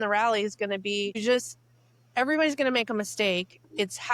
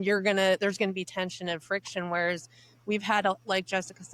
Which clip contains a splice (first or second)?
first